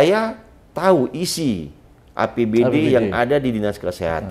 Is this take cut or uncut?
uncut